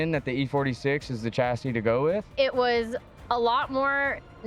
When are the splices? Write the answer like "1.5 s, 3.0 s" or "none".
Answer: 2.3 s

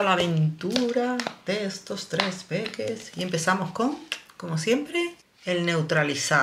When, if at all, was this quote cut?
none

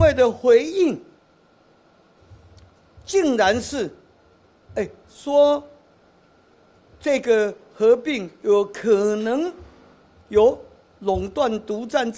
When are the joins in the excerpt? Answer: none

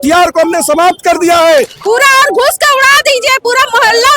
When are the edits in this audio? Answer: 1.8 s

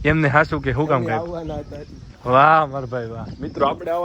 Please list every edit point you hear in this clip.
2.1 s

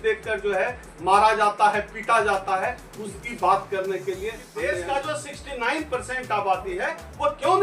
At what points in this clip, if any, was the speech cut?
4.5 s

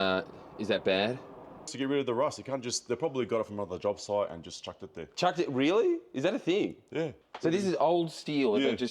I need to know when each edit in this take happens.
1.7 s, 7.2 s

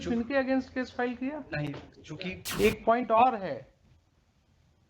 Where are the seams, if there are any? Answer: 2.4 s

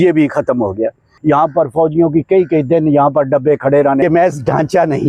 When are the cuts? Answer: 1.1 s, 4.0 s

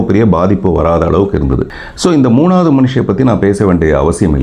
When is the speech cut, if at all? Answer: 1.7 s

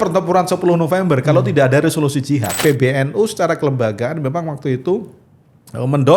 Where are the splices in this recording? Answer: 2.6 s

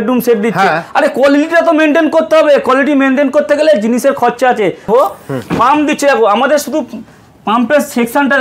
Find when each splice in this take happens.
4.9 s

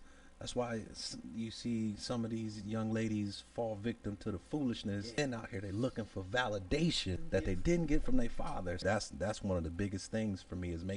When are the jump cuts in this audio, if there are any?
5.2 s, 7.2 s, 8.8 s

